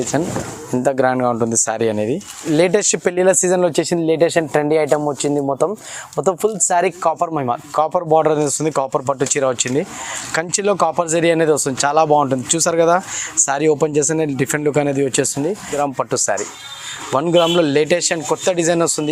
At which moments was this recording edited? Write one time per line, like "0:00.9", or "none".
0:02.3
0:15.7